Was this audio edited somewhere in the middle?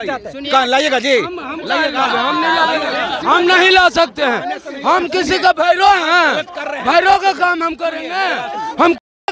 no; 0 cuts

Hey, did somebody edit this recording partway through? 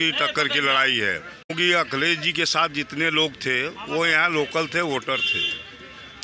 yes; 1 cut; at 1.5 s

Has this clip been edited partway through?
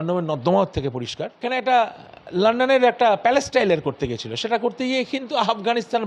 yes; 1 cut; at 1.3 s

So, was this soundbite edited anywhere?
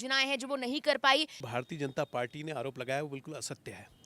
yes; 1 cut; at 1.5 s

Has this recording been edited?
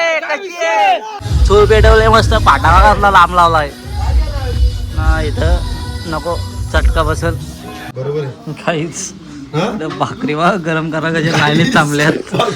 yes; 2 cuts; at 1.2 s, 7.9 s

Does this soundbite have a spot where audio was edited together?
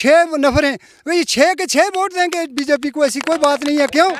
no; 0 cuts

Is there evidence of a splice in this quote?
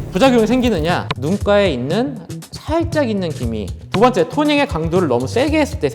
yes; 1 cut; at 3.7 s

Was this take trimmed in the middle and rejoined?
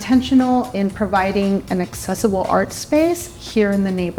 no; 0 cuts

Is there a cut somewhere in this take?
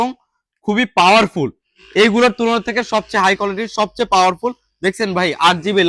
no; 0 cuts

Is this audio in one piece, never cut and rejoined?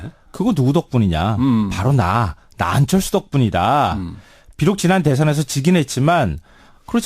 no; 1 cut; at 2.0 s

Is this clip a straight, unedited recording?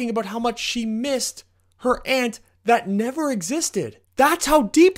no; 1 cut; at 4.0 s

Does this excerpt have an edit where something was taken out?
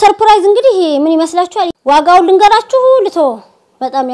yes; 1 cut; at 1.7 s

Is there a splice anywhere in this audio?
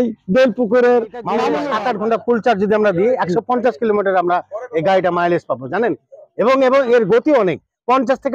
yes; 1 cut; at 1.6 s

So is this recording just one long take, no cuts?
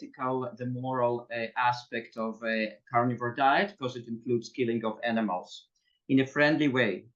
yes; 0 cuts

